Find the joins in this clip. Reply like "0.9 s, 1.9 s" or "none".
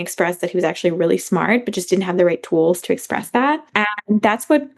3.7 s